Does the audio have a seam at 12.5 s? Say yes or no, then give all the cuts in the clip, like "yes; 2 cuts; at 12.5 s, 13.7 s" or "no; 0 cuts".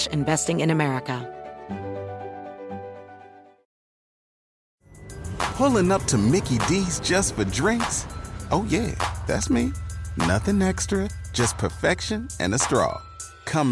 no; 1 cut; at 1.2 s